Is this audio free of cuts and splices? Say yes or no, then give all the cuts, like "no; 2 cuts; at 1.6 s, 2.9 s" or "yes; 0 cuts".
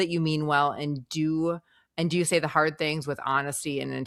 yes; 0 cuts